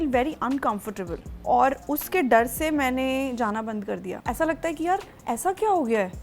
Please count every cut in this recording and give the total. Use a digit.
2